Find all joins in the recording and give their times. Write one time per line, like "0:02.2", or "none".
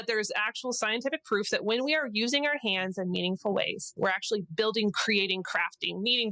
0:03.9